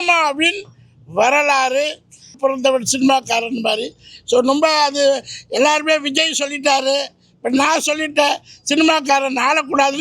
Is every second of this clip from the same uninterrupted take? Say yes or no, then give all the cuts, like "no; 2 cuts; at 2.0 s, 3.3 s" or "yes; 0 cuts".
no; 1 cut; at 2.3 s